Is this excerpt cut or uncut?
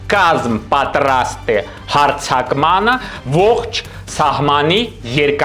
uncut